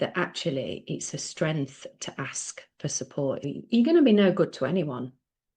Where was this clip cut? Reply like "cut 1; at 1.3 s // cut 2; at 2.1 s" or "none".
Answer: cut 1; at 3.4 s